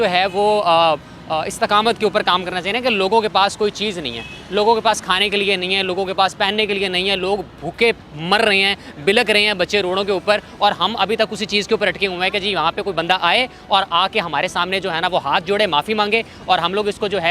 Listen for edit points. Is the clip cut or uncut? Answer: uncut